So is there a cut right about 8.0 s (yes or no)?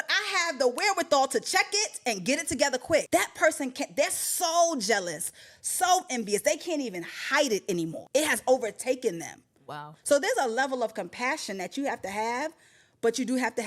yes